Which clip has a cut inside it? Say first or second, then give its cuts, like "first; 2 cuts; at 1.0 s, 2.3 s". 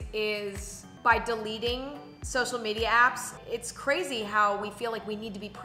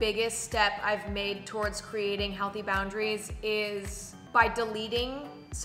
first; 1 cut; at 3.3 s